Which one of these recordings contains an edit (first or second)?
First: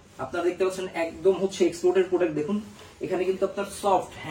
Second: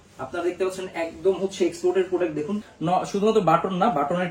second